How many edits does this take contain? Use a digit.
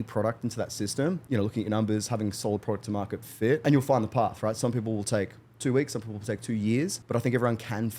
3